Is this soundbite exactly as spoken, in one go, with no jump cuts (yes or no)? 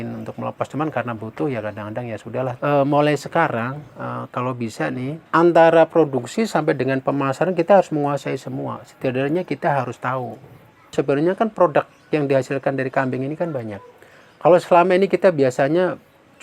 no